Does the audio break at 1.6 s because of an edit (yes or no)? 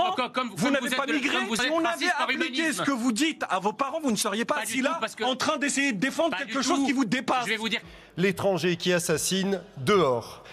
yes